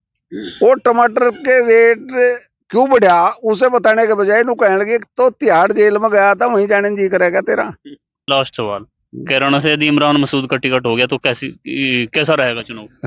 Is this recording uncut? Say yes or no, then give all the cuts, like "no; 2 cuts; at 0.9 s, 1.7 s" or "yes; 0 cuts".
no; 1 cut; at 8.2 s